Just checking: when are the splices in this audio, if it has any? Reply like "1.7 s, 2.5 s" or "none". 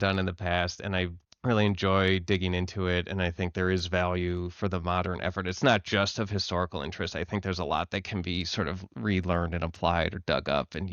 1.2 s